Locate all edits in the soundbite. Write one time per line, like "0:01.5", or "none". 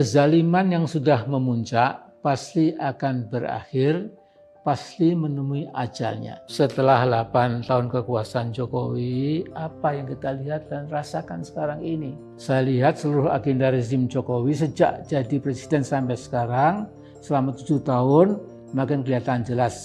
0:06.4